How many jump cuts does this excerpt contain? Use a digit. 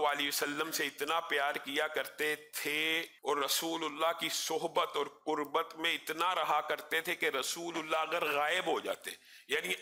1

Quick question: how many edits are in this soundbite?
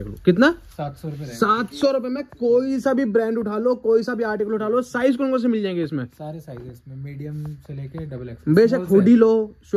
0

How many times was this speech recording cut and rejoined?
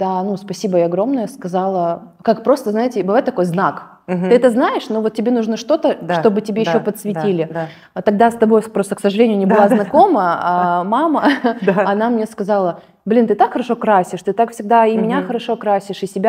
0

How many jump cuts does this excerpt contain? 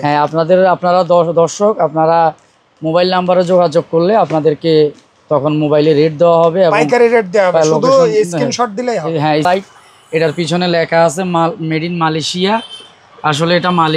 1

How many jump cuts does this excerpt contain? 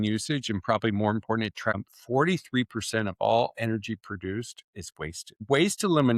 2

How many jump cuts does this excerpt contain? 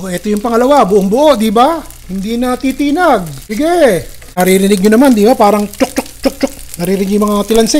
2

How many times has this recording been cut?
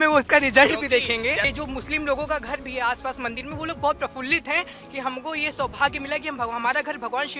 1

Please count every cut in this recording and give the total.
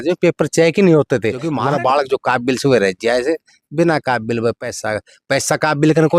1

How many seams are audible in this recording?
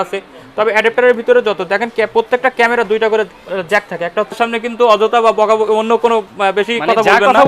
1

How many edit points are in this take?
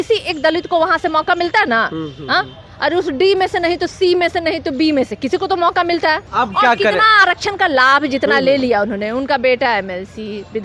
1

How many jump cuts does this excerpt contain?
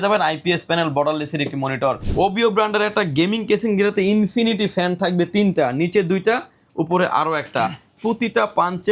1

